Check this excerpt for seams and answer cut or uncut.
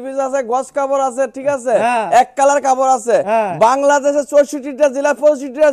uncut